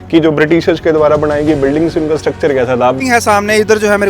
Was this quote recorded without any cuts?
no; 1 cut; at 3.0 s

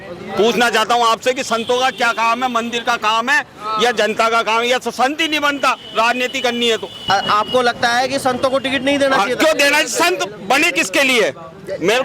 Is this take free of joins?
no; 1 cut; at 7.0 s

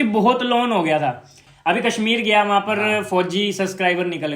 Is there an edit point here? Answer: yes; 1 cut; at 1.4 s

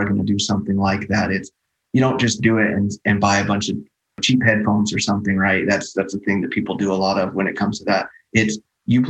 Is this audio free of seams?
no; 1 cut; at 4.2 s

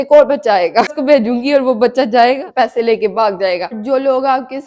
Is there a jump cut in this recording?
yes; 3 cuts; at 1.0 s, 2.5 s, 3.8 s

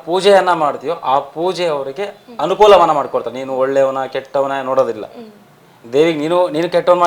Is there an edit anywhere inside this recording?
no; 0 cuts

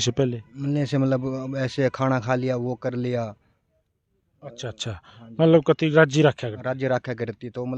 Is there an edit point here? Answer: no; 0 cuts

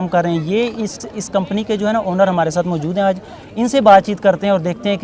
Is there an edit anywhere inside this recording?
no; 0 cuts

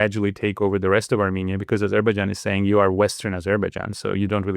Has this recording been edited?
no; 0 cuts

